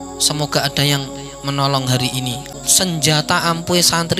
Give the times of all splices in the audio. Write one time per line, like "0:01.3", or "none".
0:02.4

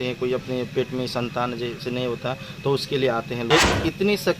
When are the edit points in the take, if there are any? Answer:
0:03.5

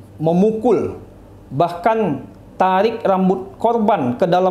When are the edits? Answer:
none

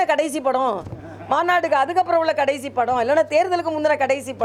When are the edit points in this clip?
none

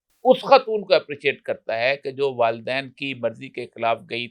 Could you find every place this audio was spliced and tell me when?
none

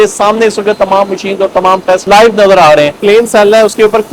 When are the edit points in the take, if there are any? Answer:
0:02.9

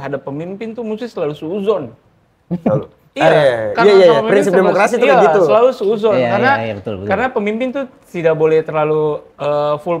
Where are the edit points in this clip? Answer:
none

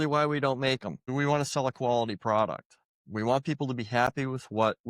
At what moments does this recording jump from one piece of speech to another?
0:01.1

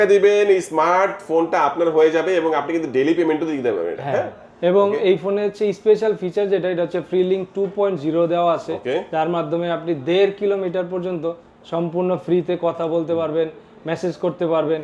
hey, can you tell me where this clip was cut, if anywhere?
none

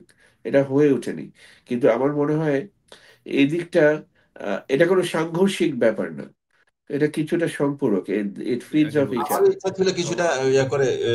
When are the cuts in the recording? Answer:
0:09.2

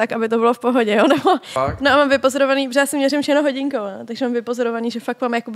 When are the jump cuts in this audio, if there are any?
0:01.6

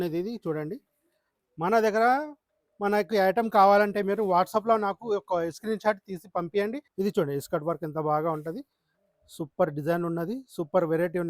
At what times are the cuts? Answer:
0:06.8

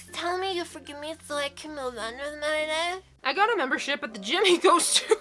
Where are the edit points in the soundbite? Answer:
0:03.2

